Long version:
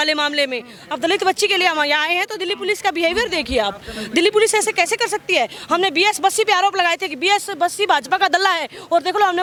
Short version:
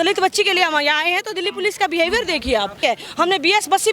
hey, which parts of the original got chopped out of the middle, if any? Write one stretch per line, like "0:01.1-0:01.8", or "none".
0:03.8-0:05.3